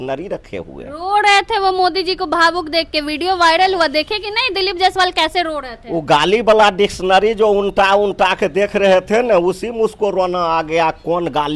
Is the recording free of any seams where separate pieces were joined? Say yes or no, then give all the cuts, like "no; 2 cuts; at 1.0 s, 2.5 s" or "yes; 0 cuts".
yes; 0 cuts